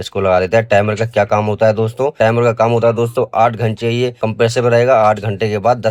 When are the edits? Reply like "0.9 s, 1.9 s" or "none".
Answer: none